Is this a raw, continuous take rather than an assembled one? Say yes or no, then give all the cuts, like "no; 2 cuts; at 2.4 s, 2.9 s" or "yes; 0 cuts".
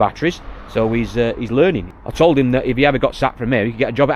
yes; 0 cuts